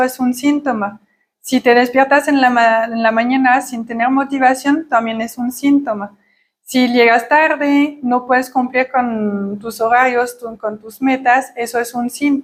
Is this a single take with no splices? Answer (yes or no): yes